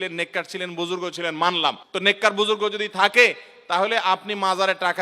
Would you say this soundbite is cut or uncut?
cut